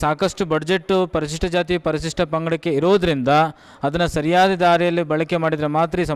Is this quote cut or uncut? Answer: uncut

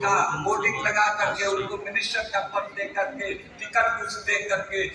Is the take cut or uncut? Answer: uncut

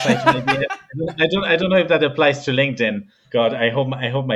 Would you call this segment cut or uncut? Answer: cut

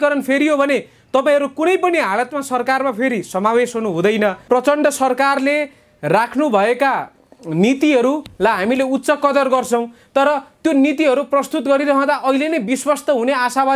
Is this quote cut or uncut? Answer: cut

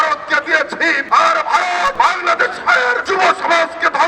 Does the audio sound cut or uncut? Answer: cut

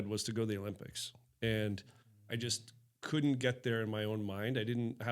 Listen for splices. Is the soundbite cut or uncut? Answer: uncut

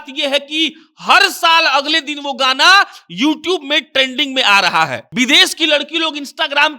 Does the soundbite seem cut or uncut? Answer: cut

